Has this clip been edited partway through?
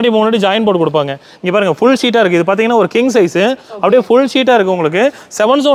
no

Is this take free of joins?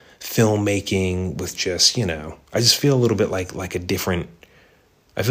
yes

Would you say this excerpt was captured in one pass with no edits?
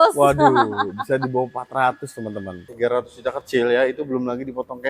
no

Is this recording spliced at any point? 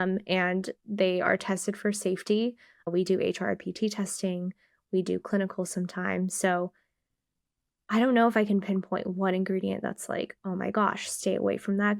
no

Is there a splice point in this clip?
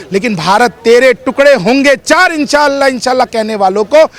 no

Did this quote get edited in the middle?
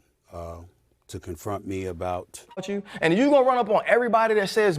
yes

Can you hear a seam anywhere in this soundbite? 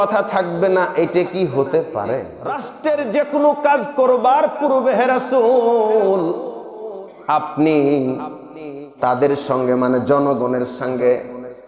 yes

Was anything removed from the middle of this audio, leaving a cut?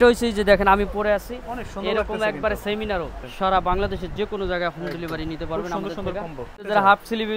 yes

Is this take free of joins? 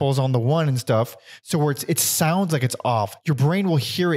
no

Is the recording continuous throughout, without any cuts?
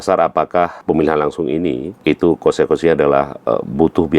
no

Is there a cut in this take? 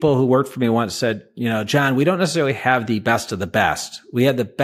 no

